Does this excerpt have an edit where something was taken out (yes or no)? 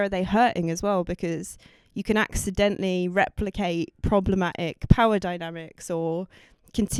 no